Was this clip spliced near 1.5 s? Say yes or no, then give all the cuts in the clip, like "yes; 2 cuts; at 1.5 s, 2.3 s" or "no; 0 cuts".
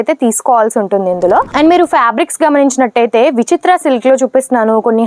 yes; 1 cut; at 1.5 s